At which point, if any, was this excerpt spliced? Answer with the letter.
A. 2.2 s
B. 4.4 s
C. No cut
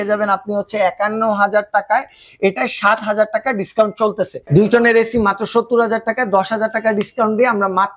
B